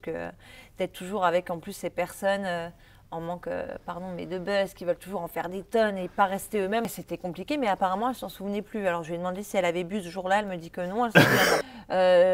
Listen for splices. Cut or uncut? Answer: cut